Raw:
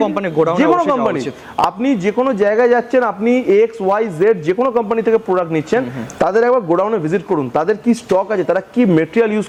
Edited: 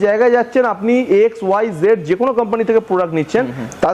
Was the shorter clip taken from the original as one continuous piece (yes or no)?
yes